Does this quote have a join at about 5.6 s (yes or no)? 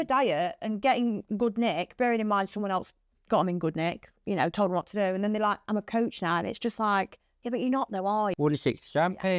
no